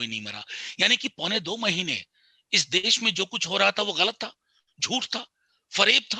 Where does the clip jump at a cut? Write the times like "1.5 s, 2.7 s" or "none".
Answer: none

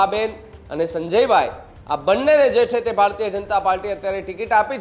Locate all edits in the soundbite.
none

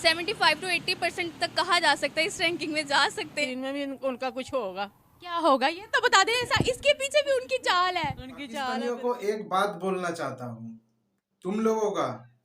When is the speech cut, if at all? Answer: 3.5 s, 8.7 s

